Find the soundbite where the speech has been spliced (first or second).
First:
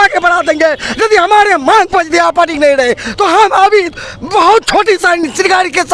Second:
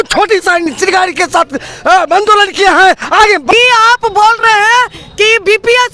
second